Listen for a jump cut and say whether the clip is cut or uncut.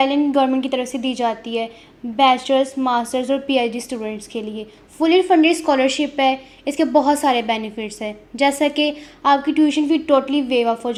uncut